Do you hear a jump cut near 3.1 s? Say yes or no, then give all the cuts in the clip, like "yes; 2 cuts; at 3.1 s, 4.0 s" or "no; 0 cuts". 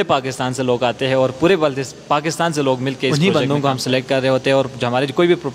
yes; 1 cut; at 3.1 s